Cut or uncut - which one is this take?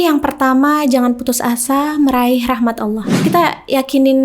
cut